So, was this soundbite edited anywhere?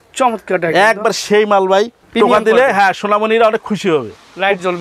yes; 1 cut; at 2.0 s

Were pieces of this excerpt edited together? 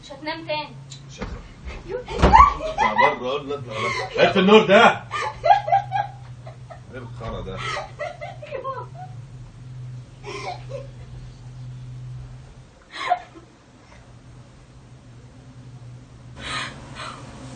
no; 0 cuts

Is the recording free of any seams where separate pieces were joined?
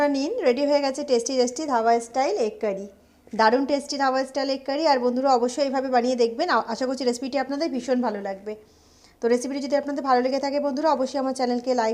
yes; 0 cuts

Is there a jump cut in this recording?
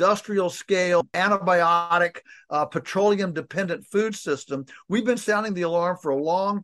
yes; 1 cut; at 1.0 s

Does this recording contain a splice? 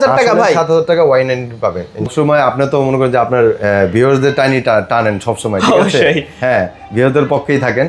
yes; 1 cut; at 2.1 s

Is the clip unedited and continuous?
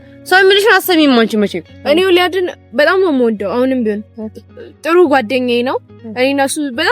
no; 1 cut; at 1.7 s

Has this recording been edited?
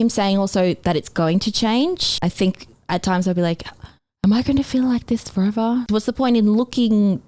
yes; 2 cuts; at 2.2 s, 5.9 s

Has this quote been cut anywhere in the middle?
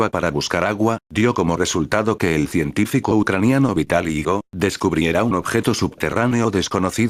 no; 0 cuts

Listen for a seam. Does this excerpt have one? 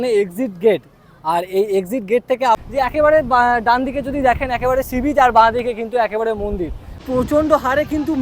yes; 2 cuts; at 2.6 s, 7.0 s

